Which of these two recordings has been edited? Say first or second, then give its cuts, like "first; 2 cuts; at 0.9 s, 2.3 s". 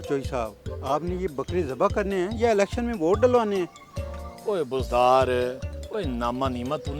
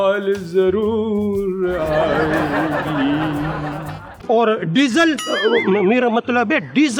second; 1 cut; at 4.2 s